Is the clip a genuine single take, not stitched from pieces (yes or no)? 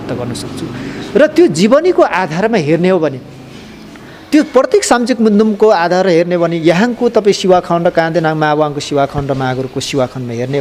yes